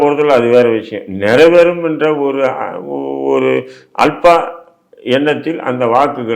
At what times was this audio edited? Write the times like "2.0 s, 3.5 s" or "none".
none